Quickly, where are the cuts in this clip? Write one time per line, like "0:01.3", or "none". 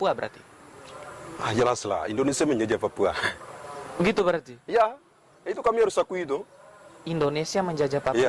none